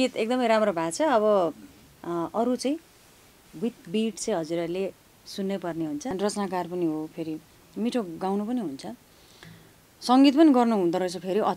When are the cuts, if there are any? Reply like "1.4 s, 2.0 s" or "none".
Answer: 6.1 s